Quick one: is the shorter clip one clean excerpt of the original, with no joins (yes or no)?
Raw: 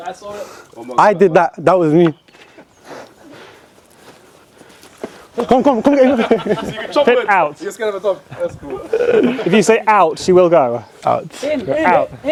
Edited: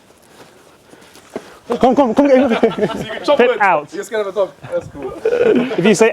yes